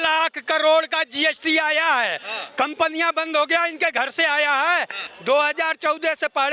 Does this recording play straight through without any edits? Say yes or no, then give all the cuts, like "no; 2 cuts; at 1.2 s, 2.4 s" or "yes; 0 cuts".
no; 1 cut; at 5.0 s